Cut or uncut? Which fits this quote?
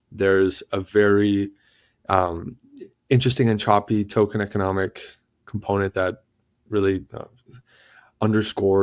uncut